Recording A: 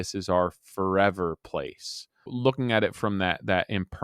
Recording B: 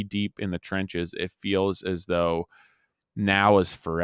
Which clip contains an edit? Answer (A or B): A